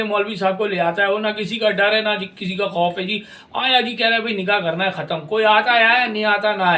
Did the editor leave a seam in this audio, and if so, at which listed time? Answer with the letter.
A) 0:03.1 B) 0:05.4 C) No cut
C